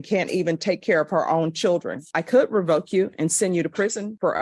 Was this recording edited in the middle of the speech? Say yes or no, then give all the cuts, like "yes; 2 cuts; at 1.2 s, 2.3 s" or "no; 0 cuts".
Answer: yes; 1 cut; at 2.1 s